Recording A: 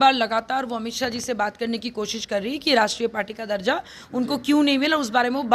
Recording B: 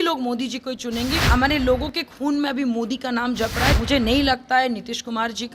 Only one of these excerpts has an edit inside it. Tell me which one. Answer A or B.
B